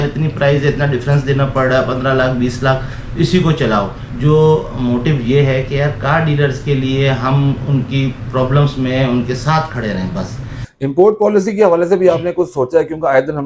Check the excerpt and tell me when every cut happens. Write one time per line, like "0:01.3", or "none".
0:04.0
0:10.6